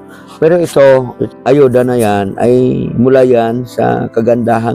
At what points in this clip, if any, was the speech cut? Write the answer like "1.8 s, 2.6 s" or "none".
1.2 s